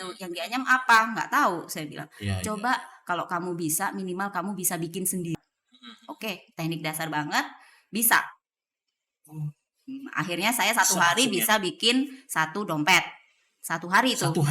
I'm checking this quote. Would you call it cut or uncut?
cut